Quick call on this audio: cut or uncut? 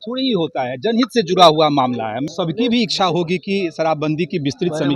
cut